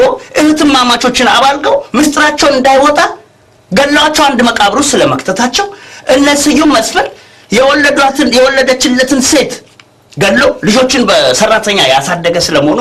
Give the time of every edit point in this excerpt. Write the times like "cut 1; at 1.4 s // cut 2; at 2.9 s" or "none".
none